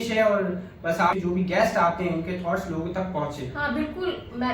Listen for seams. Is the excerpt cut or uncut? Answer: cut